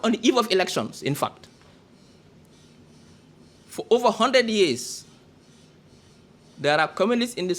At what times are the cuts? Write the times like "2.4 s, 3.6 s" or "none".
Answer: 2.5 s